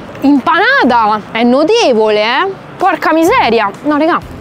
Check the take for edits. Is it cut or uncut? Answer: uncut